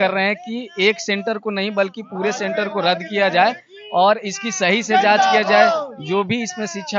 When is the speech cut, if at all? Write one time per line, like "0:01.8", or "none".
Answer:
none